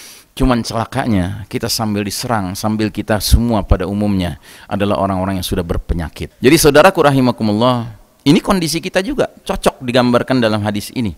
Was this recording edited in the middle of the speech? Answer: yes; 1 cut; at 6.2 s

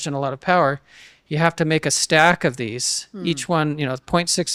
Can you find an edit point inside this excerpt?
no; 0 cuts

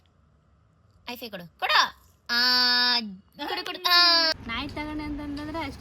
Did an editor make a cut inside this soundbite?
yes; 1 cut; at 4.3 s

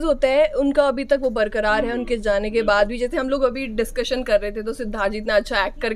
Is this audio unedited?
yes; 0 cuts

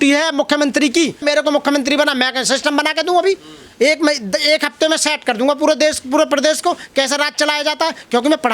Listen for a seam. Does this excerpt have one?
no; 0 cuts

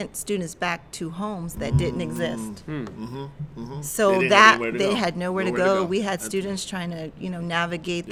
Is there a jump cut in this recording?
no; 0 cuts

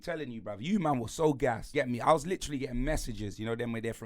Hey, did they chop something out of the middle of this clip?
yes; 1 cut; at 1.6 s

